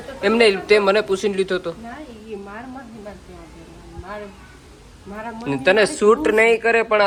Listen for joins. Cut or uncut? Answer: uncut